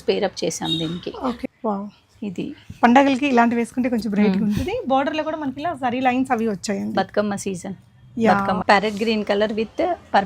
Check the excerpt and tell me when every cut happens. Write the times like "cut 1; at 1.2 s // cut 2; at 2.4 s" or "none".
cut 1; at 1.4 s // cut 2; at 8.6 s